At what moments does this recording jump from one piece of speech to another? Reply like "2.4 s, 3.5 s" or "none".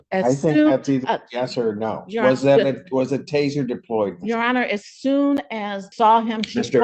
5.8 s